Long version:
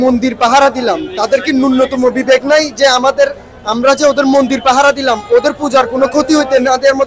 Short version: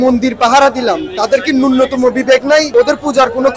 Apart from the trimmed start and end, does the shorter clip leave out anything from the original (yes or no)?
yes